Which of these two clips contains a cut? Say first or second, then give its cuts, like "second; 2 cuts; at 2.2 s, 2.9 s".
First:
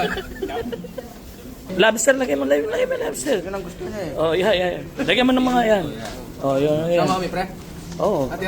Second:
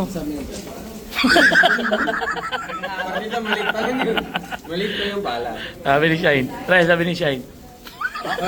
first; 1 cut; at 1.7 s